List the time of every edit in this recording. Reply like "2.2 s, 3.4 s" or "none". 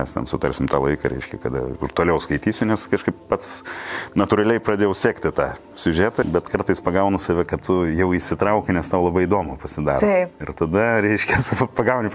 6.2 s